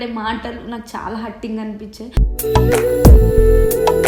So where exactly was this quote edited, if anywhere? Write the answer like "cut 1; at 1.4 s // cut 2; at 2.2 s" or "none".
none